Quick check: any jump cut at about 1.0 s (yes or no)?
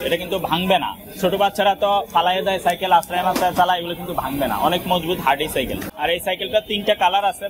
no